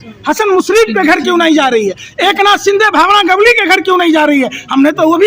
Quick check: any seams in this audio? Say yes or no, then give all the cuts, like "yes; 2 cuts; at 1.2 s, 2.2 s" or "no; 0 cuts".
no; 0 cuts